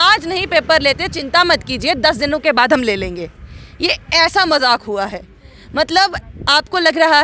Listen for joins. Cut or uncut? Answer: uncut